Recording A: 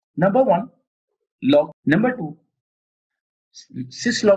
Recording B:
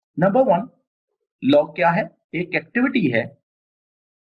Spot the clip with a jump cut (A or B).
A